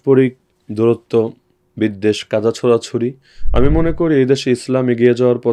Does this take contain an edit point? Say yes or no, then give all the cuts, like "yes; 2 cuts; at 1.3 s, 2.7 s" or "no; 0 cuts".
no; 0 cuts